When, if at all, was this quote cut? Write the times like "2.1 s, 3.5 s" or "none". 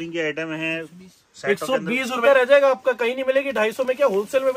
2.2 s